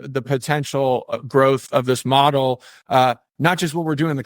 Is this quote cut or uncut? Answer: cut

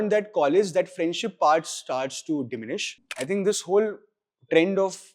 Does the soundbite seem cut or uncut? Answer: cut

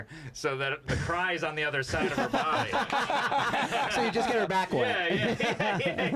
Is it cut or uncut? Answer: uncut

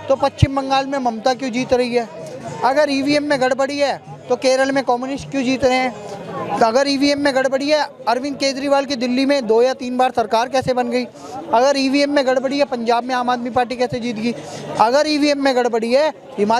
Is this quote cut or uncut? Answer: uncut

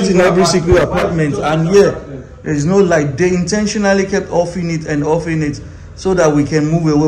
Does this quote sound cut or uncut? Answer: uncut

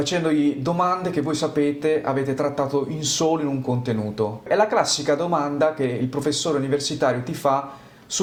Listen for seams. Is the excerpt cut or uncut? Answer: uncut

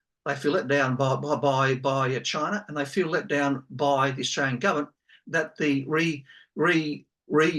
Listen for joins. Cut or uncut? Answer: uncut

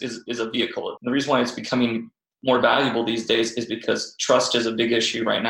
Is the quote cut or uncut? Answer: cut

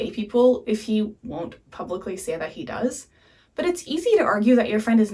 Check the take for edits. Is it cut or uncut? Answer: uncut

